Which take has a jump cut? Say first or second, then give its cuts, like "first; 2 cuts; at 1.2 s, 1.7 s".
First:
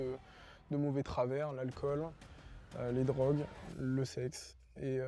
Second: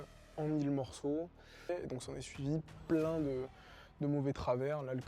second; 1 cut; at 1.7 s